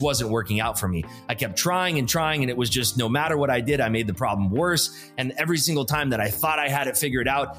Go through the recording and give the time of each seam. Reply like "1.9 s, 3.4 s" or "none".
none